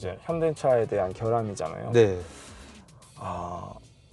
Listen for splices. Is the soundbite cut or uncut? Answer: uncut